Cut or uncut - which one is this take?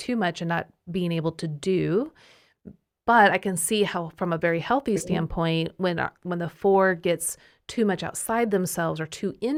uncut